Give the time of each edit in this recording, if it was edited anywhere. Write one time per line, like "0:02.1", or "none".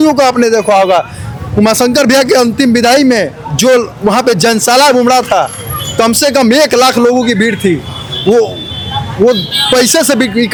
none